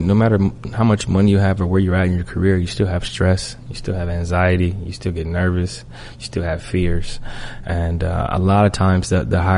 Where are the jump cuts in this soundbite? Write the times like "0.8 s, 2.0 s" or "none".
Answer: none